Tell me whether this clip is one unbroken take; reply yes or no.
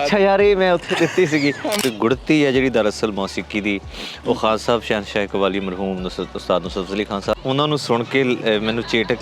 no